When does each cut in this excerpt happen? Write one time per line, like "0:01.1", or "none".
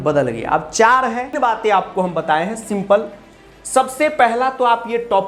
0:01.4